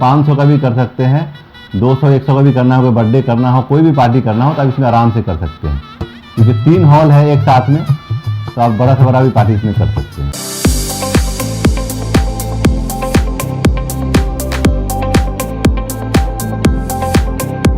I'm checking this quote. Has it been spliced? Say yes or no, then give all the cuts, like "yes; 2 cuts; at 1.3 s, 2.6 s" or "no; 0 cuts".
yes; 1 cut; at 10.3 s